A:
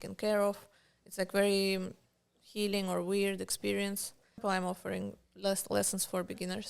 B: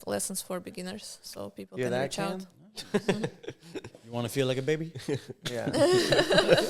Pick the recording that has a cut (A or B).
A